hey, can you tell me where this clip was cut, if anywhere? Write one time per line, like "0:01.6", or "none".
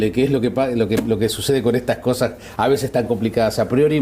none